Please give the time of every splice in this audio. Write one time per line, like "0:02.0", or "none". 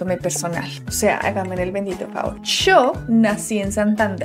none

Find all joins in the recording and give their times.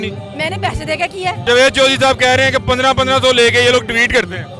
0:01.4

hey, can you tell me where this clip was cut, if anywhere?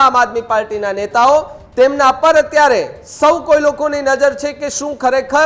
none

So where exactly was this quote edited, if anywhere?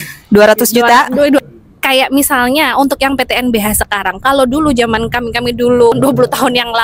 0:01.4

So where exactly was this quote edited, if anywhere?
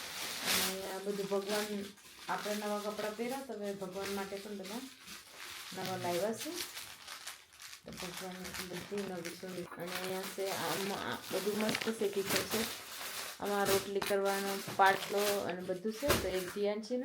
0:09.7

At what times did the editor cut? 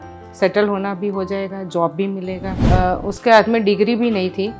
0:02.5

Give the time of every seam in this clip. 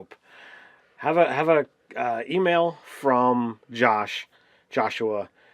0:02.6

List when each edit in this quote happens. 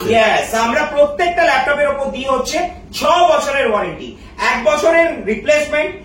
none

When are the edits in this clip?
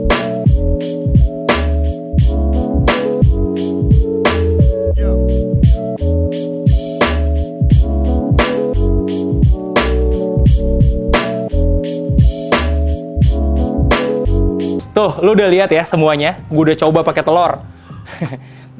0:14.8

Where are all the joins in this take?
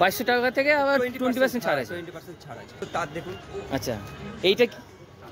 0:02.8

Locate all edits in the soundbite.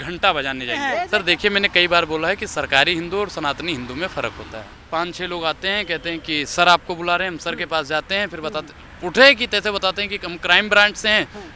0:01.0
0:04.7

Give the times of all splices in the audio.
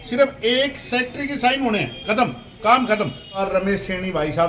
0:03.4

